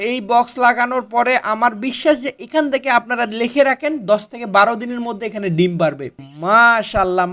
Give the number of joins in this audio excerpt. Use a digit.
1